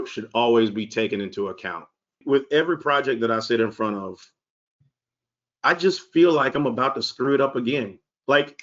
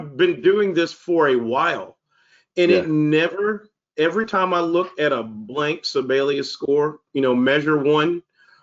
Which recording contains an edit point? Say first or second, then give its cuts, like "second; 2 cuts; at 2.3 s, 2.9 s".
first; 1 cut; at 2.2 s